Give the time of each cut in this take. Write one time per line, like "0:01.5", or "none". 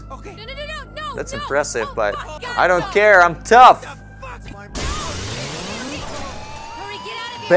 0:02.4